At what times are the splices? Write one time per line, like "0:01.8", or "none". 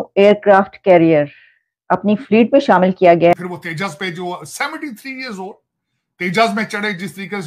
0:03.3